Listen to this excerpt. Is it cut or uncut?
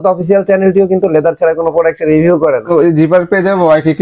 cut